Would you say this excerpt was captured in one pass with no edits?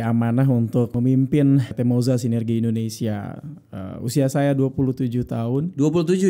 no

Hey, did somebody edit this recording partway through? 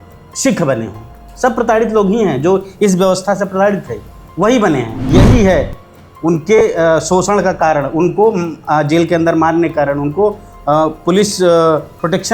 yes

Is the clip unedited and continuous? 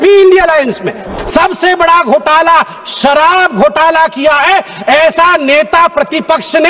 no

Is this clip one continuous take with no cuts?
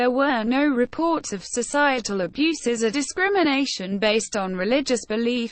no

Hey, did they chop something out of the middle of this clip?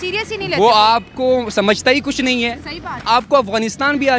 yes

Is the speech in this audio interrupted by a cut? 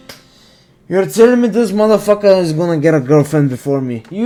no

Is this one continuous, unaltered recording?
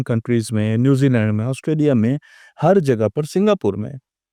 yes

